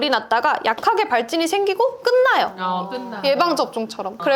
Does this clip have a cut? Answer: no; 0 cuts

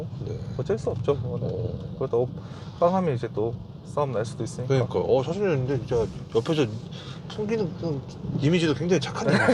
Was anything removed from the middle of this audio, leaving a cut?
no; 0 cuts

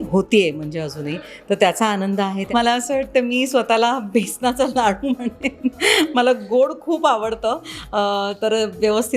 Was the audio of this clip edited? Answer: yes; 1 cut; at 2.5 s

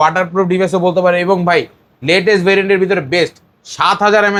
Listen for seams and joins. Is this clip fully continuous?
yes; 0 cuts

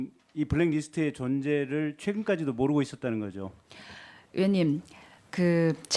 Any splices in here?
no; 0 cuts

